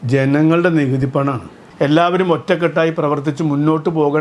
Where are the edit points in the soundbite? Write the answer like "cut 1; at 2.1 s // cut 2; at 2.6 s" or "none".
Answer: cut 1; at 1.6 s